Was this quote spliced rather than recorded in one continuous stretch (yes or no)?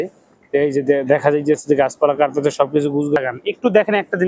yes